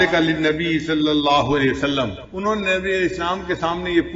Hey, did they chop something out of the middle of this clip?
yes; 1 cut; at 2.2 s

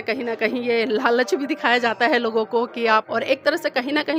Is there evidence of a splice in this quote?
no; 0 cuts

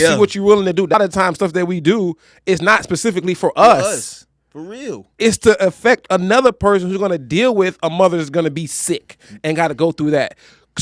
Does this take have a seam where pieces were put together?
yes; 1 cut; at 0.9 s

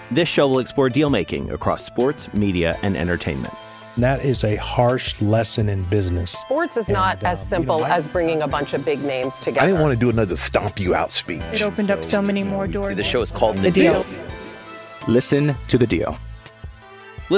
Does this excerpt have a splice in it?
no; 0 cuts

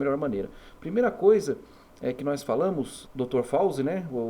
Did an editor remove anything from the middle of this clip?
yes; 1 cut; at 3.0 s

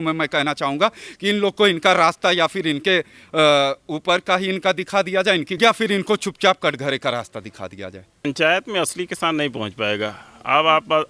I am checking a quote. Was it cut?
yes; 1 cut; at 8.2 s

